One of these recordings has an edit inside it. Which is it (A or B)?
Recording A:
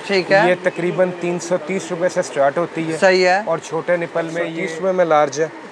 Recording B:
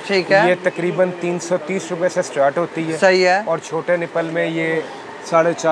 A